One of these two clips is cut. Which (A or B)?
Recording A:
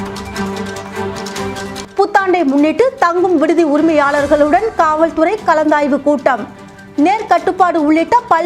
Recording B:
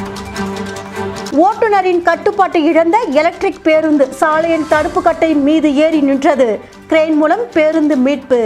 A